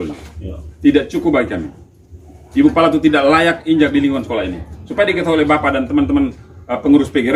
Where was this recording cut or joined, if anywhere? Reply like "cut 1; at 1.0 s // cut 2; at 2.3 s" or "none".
none